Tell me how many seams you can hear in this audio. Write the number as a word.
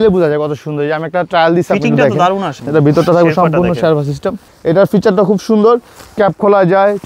two